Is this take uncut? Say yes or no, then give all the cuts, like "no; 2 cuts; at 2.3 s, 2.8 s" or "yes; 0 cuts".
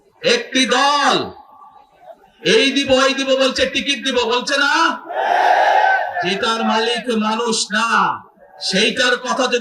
yes; 0 cuts